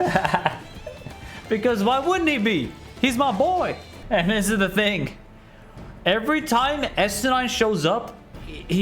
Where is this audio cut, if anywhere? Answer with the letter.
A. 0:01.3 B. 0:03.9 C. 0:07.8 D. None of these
B